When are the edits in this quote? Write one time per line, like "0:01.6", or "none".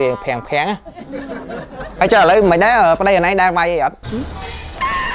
0:01.8